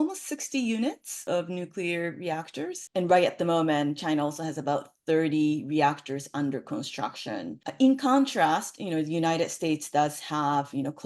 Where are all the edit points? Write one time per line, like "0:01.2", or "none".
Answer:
0:01.1
0:07.6

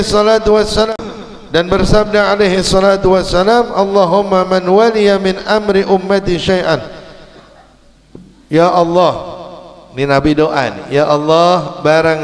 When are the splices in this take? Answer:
0:00.9

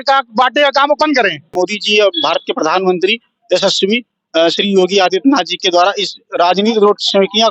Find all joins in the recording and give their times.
0:01.5

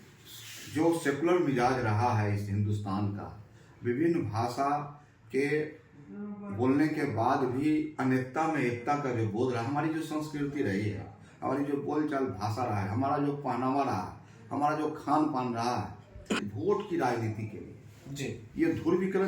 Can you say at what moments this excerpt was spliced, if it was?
0:16.4

